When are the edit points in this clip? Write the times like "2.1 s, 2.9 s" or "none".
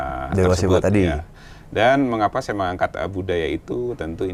none